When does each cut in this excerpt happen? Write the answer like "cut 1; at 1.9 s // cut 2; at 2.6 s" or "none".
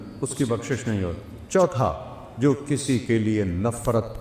cut 1; at 1.4 s

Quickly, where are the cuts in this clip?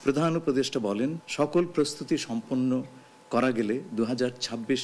cut 1; at 1.2 s

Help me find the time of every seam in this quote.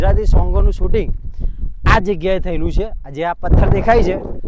none

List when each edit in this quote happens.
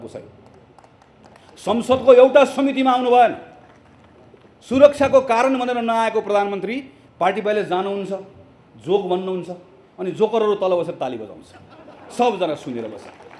cut 1; at 6.9 s

